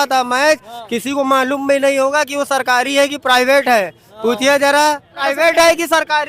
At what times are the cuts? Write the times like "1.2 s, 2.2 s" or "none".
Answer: 5.2 s